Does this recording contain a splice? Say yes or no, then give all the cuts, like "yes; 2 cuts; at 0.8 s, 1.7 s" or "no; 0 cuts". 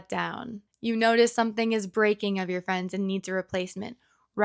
no; 0 cuts